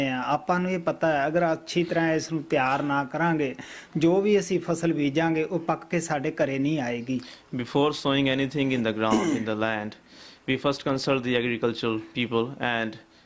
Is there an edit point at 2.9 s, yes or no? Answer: yes